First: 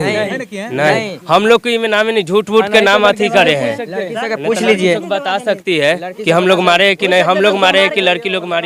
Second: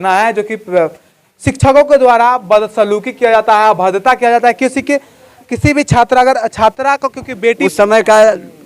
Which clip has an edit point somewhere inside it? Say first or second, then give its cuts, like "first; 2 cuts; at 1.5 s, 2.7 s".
second; 1 cut; at 7.6 s